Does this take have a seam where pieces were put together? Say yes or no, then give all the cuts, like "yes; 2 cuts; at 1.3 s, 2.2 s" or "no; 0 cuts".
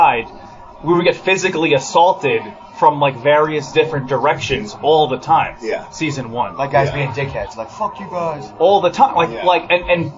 no; 0 cuts